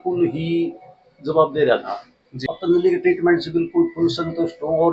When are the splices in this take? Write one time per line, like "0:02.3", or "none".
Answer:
0:02.3